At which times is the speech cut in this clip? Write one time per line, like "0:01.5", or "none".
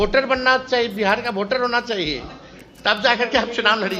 none